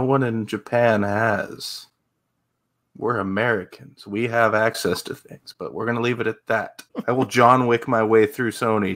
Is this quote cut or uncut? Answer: cut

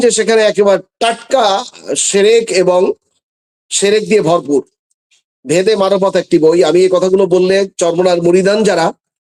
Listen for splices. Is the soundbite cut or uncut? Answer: uncut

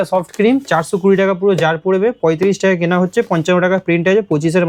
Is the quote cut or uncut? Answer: uncut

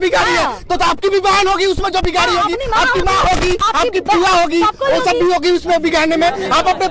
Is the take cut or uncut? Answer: uncut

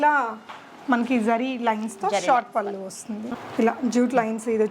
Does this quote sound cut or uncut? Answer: cut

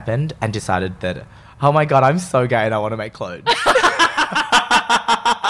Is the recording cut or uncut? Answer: uncut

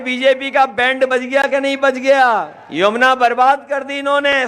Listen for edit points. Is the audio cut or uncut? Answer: cut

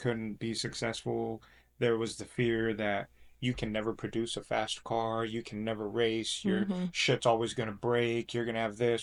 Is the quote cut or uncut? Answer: uncut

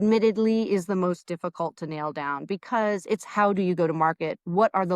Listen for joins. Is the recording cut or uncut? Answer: uncut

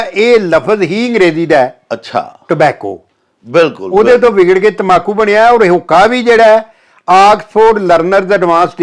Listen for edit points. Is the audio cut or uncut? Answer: uncut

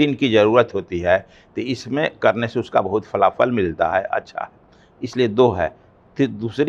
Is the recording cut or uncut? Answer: uncut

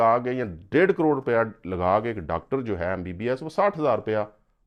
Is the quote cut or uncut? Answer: uncut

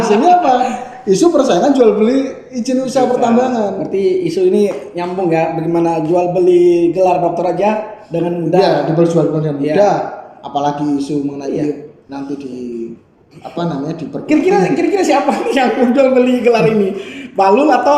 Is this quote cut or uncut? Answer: uncut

